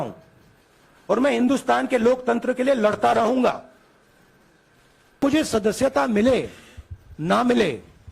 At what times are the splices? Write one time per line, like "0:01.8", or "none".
0:05.2